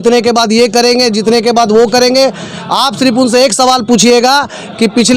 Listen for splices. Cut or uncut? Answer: uncut